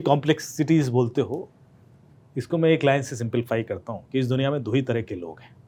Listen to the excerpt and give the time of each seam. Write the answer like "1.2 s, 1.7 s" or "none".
none

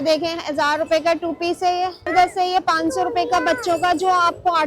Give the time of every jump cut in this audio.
2.1 s

